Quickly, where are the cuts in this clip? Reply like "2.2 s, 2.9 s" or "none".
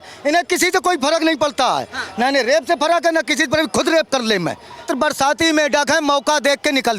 4.9 s